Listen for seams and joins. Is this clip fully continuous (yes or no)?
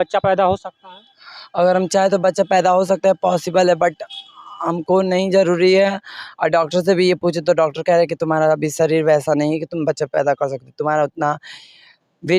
yes